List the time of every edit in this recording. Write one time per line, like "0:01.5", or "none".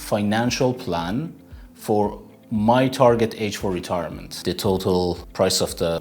0:04.3

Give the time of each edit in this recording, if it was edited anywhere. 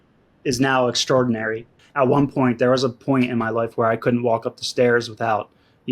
0:01.8

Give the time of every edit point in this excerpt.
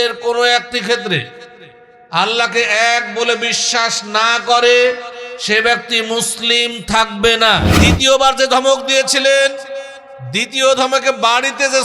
0:07.7

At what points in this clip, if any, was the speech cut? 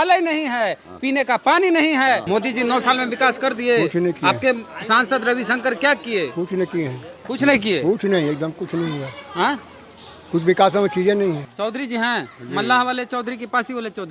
0:02.2
0:11.5

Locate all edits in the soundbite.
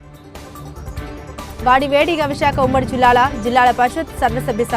0:01.3

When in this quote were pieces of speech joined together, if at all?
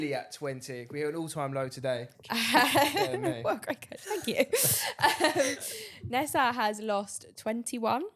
0:02.1

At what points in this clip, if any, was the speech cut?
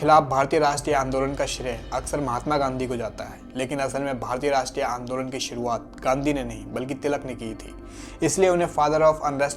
none

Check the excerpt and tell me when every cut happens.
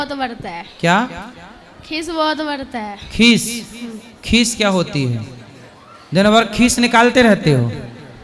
none

